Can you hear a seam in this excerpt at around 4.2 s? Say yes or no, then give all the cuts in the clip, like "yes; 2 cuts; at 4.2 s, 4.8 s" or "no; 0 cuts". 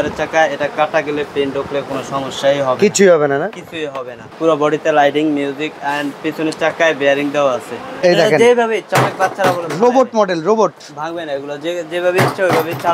yes; 2 cuts; at 4.2 s, 7.8 s